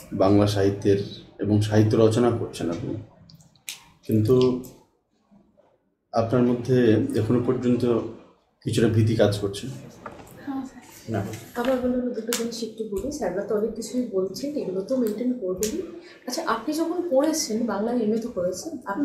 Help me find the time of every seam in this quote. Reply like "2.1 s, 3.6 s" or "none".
11.0 s

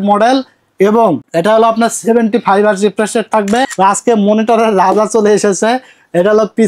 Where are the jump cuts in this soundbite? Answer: 1.2 s, 3.7 s

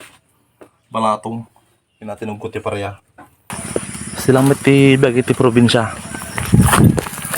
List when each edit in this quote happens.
3.5 s

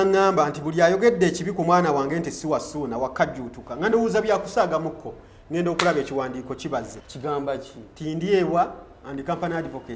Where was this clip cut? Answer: 7.0 s

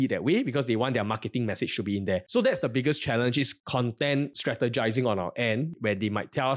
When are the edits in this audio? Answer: 2.3 s, 3.6 s

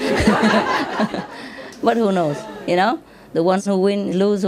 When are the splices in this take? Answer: 1.7 s

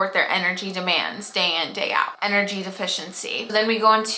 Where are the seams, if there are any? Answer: none

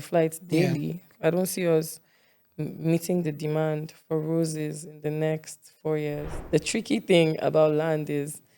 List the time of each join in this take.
1.1 s, 6.3 s

